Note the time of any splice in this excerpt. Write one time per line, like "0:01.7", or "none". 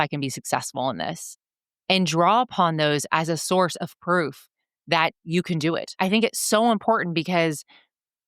0:06.0